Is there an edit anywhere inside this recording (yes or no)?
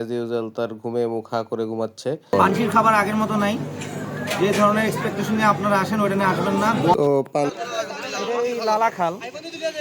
yes